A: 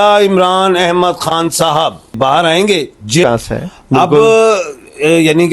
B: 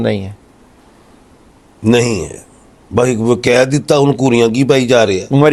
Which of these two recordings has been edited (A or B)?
A